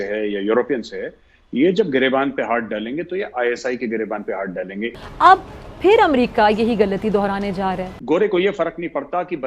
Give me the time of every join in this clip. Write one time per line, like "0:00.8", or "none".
0:04.9
0:07.9